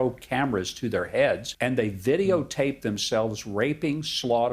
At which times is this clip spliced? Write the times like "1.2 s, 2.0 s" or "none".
1.5 s